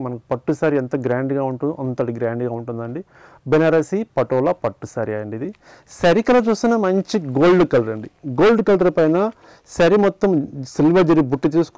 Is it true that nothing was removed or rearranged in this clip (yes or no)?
yes